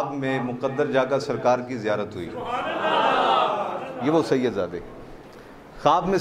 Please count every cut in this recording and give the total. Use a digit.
0